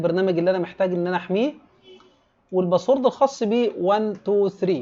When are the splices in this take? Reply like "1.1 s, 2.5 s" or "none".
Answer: none